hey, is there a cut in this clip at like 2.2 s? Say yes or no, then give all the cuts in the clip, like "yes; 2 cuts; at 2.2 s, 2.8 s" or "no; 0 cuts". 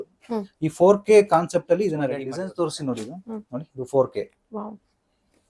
yes; 1 cut; at 2.2 s